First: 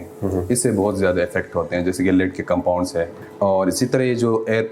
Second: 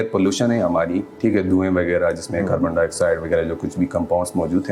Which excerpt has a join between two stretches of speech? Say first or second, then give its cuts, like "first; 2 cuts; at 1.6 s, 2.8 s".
first; 1 cut; at 3.1 s